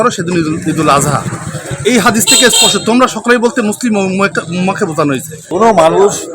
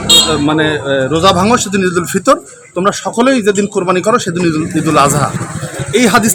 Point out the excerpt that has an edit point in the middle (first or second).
first